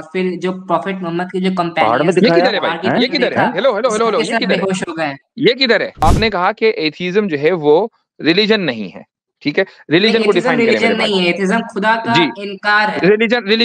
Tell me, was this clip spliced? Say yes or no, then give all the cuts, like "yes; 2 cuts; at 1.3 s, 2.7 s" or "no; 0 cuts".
yes; 1 cut; at 6.0 s